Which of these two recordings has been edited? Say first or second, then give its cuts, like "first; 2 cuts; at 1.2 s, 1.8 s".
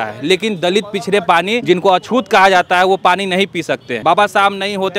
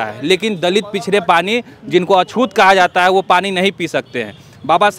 first; 2 cuts; at 1.6 s, 3.9 s